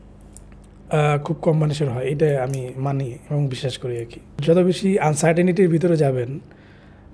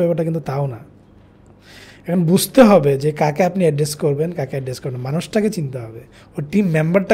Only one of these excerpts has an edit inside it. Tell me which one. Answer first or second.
first